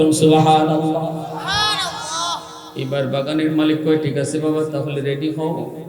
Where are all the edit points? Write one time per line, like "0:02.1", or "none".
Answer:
0:02.6